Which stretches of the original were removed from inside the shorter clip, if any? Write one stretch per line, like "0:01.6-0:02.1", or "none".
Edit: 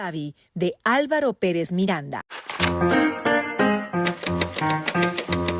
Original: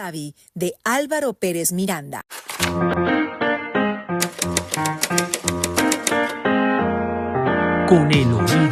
0:02.8-0:03.0